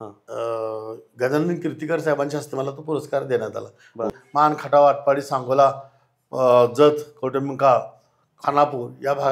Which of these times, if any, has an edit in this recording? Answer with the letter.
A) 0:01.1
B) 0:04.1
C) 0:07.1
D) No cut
B